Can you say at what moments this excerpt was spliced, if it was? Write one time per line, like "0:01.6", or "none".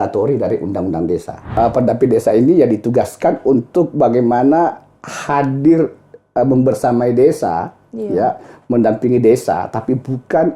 0:01.4